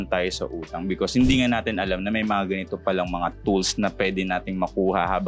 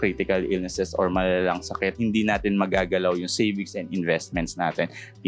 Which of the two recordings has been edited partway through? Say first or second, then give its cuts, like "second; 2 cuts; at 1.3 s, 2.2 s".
second; 1 cut; at 2.0 s